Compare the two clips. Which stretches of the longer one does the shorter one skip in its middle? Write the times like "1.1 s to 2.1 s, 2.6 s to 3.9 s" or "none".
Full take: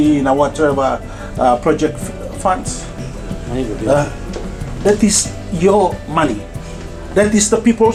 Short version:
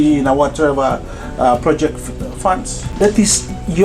2.8 s to 4.6 s